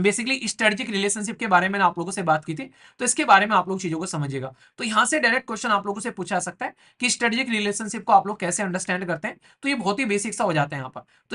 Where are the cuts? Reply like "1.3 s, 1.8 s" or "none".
none